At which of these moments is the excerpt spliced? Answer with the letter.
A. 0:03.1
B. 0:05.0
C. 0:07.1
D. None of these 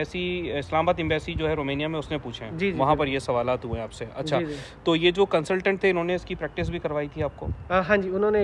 D